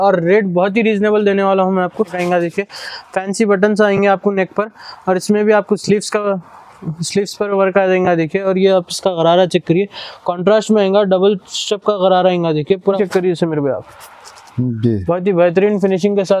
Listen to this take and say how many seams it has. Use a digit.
2